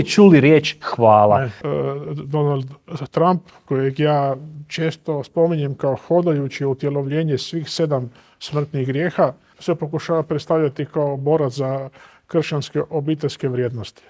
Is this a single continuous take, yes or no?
no